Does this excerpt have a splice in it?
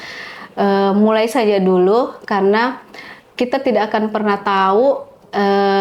no; 0 cuts

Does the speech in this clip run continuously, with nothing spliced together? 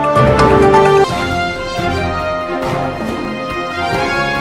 yes; 0 cuts

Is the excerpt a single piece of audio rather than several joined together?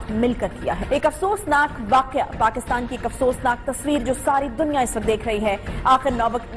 yes; 0 cuts

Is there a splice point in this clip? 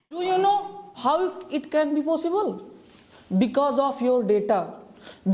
no; 0 cuts

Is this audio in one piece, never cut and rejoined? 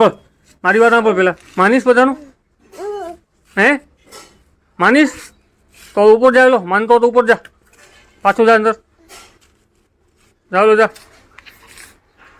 yes; 0 cuts

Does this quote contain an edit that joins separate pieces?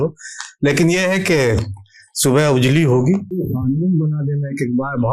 yes; 1 cut; at 3.3 s

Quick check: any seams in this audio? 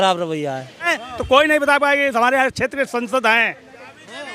yes; 1 cut; at 0.9 s

